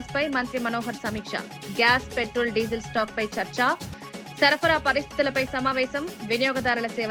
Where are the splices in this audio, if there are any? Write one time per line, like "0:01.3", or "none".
none